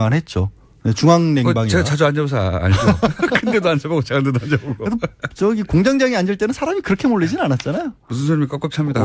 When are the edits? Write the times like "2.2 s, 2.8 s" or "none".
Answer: 3.7 s